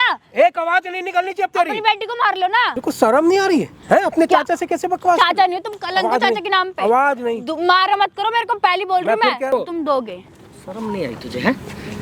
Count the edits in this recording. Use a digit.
2